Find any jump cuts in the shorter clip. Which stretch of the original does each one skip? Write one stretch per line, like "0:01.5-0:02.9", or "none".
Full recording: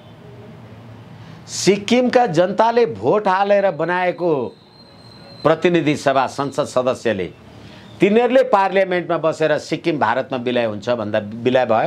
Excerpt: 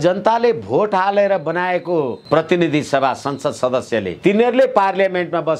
0:04.5-0:05.3
0:07.3-0:07.9